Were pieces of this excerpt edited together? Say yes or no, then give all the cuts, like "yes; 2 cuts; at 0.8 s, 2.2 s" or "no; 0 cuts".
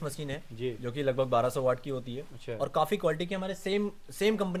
no; 0 cuts